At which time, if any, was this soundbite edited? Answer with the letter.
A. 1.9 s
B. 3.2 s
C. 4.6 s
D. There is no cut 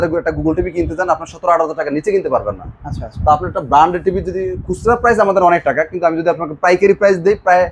D